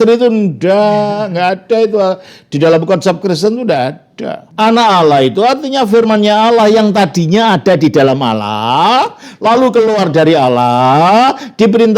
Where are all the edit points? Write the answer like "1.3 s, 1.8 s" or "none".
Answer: 4.4 s